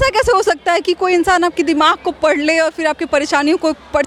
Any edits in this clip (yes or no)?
no